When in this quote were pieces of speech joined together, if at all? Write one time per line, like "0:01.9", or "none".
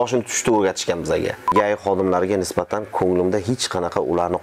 0:01.5